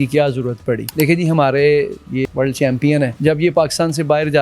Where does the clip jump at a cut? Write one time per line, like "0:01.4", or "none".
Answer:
0:00.9
0:02.2
0:03.1